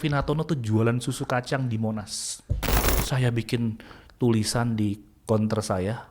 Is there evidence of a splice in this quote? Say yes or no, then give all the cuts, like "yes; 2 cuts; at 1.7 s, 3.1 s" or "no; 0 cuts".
yes; 1 cut; at 2.9 s